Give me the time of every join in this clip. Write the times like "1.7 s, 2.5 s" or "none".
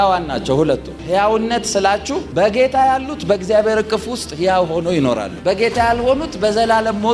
0.9 s